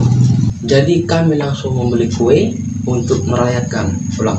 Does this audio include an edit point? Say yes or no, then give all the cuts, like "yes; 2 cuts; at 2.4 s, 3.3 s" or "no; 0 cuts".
no; 0 cuts